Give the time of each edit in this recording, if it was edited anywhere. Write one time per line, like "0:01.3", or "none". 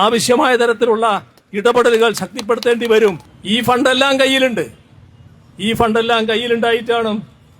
0:03.3